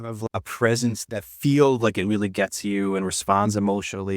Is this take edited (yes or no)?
yes